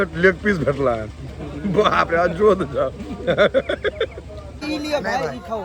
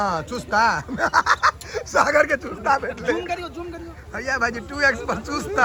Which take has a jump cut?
first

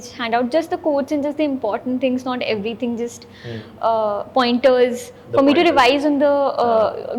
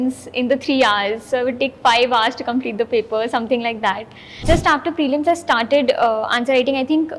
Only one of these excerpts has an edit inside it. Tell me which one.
second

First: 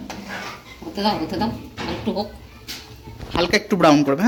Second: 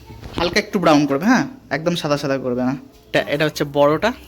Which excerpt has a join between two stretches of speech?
second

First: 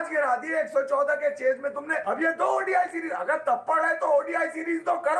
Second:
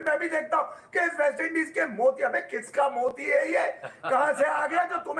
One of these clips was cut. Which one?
first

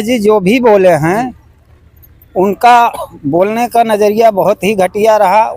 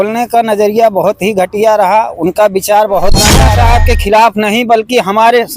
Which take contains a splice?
second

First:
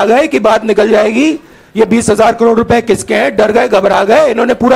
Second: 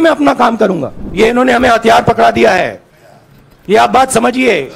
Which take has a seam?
second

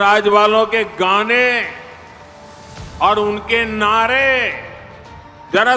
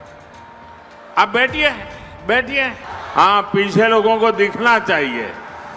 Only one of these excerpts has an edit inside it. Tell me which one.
second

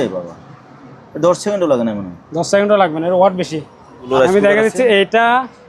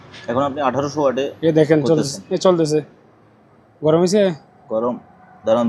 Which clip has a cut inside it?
first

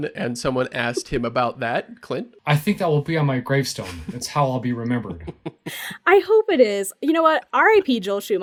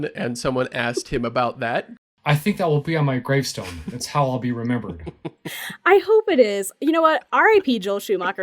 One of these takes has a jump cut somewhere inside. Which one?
second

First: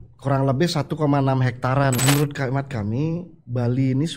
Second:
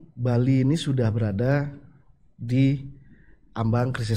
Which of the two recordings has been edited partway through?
first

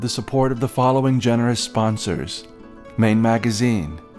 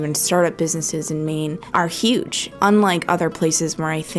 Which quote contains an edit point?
second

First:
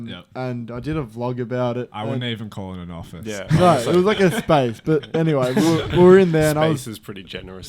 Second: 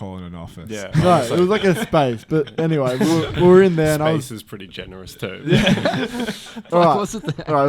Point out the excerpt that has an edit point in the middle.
second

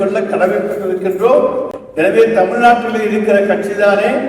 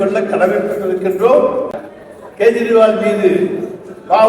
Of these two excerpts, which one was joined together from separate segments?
second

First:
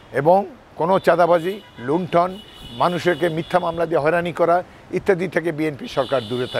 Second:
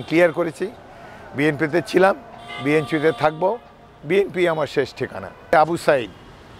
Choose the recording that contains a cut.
second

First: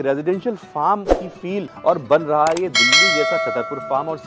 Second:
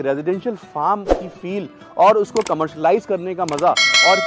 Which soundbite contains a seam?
first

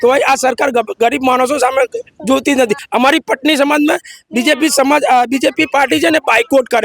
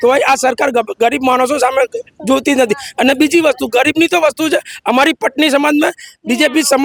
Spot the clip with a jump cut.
first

